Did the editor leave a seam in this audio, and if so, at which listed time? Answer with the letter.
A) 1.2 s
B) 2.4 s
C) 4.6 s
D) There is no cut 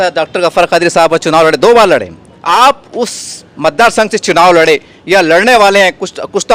B